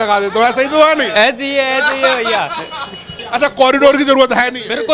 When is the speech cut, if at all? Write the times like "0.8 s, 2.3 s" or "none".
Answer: 3.1 s